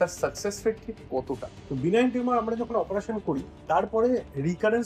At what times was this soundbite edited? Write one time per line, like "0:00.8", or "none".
0:01.5